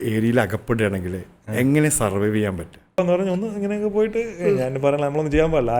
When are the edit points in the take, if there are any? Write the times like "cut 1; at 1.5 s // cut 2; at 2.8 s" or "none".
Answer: cut 1; at 3.0 s